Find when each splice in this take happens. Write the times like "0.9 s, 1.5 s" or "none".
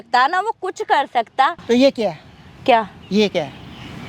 1.6 s